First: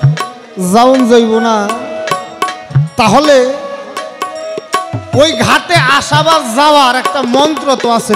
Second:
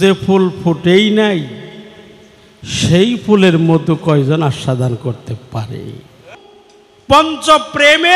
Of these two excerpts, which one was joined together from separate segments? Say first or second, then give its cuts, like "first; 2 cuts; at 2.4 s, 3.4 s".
second; 1 cut; at 6.2 s